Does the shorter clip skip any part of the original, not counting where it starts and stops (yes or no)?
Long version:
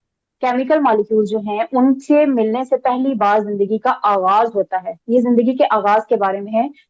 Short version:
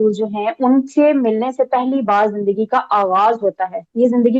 no